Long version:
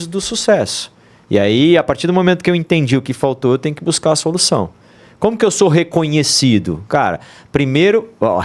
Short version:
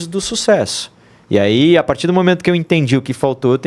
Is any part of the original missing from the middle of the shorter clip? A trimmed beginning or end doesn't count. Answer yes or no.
no